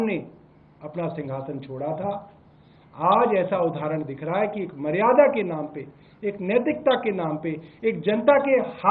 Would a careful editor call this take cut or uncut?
uncut